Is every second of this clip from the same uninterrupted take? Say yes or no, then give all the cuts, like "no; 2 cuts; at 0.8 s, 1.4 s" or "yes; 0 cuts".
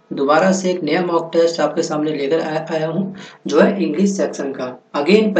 yes; 0 cuts